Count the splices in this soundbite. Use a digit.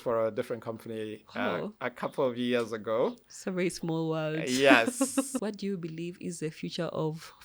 1